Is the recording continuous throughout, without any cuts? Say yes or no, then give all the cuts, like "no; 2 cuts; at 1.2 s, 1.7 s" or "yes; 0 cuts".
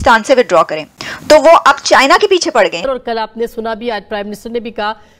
no; 1 cut; at 2.8 s